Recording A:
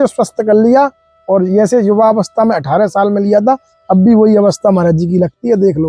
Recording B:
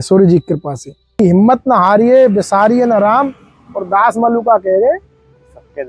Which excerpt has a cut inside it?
B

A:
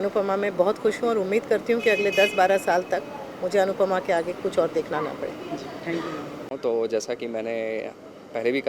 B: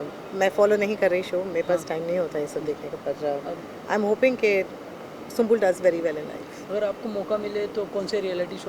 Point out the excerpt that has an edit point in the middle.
A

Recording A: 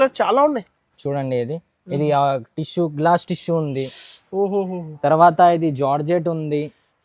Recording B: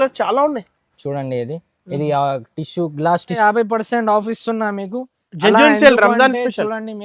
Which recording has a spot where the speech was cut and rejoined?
B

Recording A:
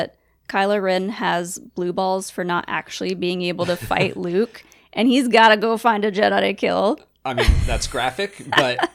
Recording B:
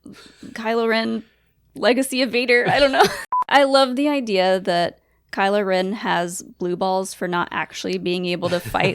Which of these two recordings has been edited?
B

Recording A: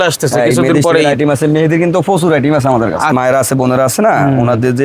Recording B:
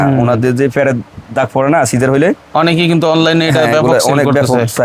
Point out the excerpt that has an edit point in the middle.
A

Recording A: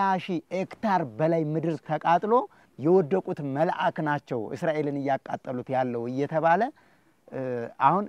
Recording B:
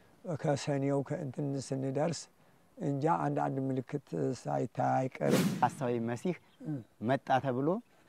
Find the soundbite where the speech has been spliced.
B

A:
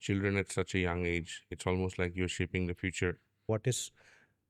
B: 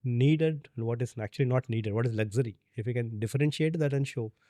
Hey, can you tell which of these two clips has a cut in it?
A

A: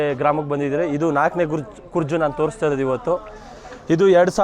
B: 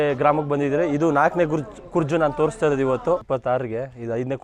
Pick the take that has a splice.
B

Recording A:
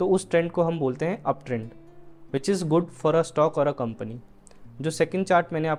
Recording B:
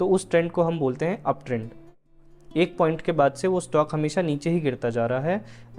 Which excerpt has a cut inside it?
B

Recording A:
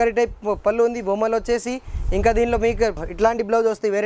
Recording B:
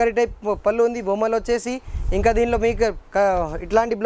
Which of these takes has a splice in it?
A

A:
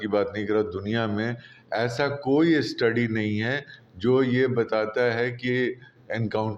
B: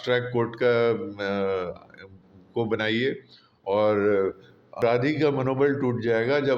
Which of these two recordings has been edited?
B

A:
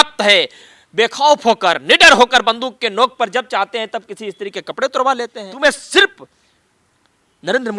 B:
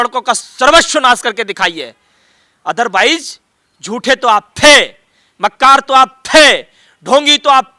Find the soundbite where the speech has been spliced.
A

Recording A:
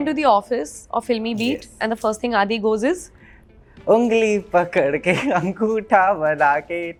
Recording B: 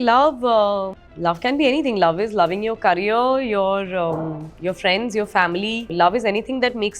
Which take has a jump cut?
B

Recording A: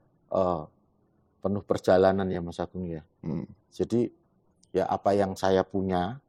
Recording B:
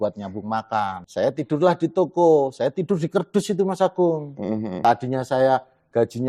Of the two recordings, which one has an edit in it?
B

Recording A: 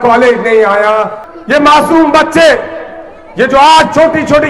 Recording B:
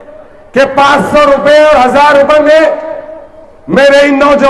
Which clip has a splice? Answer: A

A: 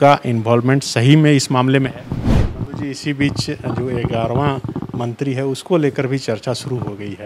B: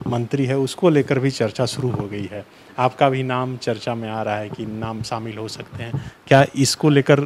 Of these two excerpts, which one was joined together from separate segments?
A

